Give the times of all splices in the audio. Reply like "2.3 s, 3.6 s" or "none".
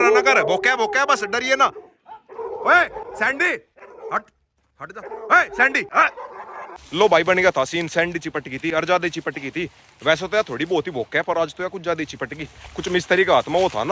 none

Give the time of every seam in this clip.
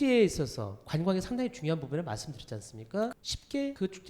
3.1 s

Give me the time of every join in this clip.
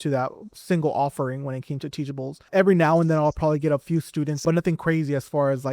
2.5 s, 4.4 s

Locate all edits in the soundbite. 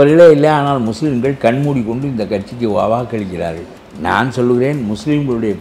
3.7 s

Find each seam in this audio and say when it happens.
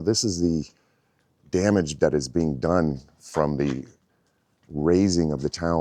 none

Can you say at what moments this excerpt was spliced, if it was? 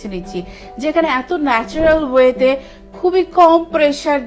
none

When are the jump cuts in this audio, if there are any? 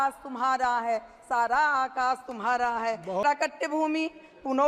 3.2 s

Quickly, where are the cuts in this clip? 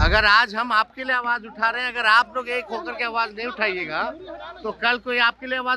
none

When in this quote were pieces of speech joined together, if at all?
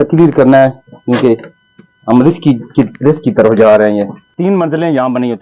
4.2 s

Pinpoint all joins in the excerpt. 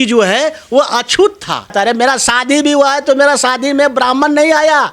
1.7 s

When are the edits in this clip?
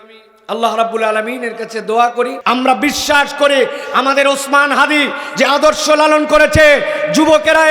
2.4 s

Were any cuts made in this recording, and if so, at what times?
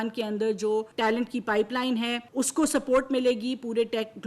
1.2 s, 2.2 s

